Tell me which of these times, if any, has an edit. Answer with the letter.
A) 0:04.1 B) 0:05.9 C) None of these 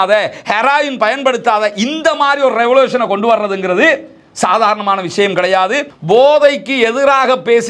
B